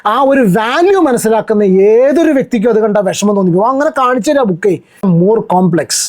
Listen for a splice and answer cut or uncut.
cut